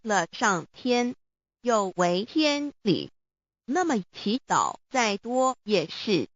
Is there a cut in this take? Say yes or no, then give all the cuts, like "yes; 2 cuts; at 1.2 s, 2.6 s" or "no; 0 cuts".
no; 0 cuts